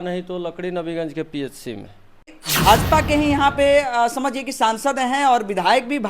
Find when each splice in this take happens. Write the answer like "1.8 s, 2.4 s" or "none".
2.4 s

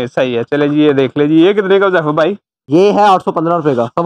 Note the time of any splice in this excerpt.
none

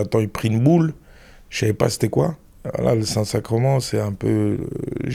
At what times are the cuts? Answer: none

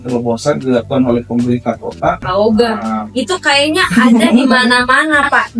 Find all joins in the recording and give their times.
2.3 s

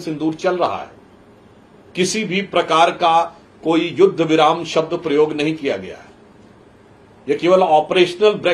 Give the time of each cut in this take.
none

